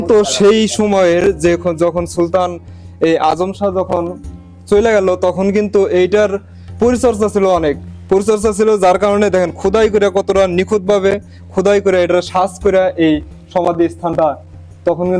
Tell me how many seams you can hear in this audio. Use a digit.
0